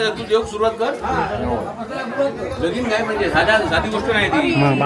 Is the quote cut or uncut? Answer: uncut